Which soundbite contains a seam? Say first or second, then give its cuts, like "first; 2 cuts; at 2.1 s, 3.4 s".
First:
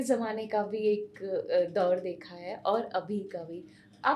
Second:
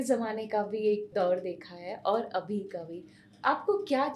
second; 1 cut; at 1.1 s